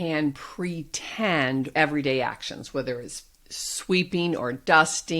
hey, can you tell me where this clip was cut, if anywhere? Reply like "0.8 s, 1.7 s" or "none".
1.7 s

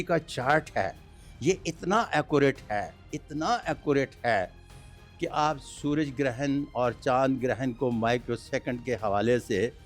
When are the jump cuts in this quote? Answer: none

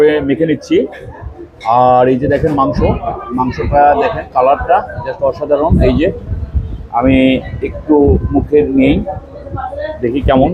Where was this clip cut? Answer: none

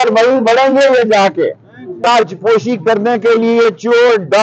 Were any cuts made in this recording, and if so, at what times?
1.9 s

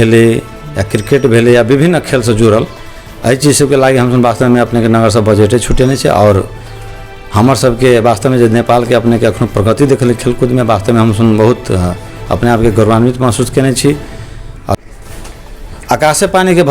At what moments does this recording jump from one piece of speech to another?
14.8 s

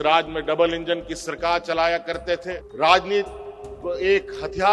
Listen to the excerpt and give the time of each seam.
2.6 s

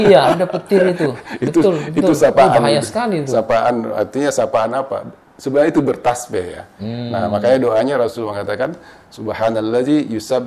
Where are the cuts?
none

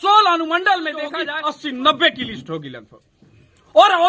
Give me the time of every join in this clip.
1.3 s

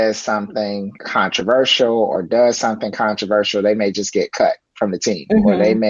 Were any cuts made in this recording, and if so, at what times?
1.0 s

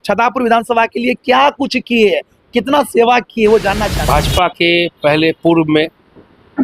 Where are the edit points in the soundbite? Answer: 3.9 s

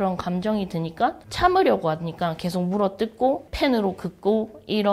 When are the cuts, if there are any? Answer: 1.2 s, 3.5 s

